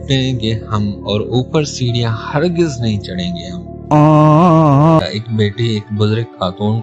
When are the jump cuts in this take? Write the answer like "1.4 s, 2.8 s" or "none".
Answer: 5.0 s